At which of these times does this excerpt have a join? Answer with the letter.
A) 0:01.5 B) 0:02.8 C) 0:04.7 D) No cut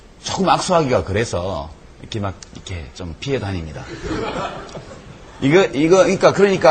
D